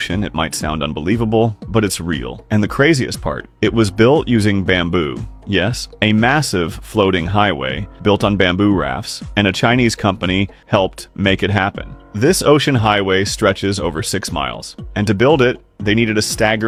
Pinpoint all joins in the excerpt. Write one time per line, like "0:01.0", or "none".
none